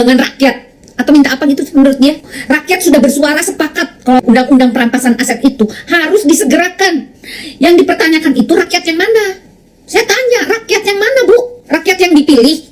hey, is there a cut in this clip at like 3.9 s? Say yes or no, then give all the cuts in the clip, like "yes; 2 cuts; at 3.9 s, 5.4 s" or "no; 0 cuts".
no; 2 cuts; at 2.3 s, 11.6 s